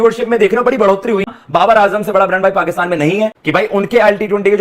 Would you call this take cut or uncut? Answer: cut